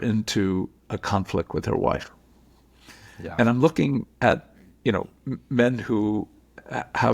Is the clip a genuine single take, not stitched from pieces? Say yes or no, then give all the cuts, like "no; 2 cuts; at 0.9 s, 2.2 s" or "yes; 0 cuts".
yes; 0 cuts